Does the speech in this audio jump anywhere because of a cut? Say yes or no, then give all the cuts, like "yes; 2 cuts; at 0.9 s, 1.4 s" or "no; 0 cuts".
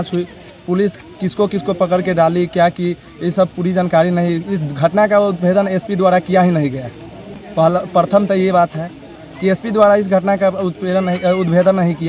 no; 0 cuts